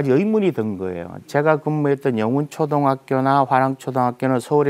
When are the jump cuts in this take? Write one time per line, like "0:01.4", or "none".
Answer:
none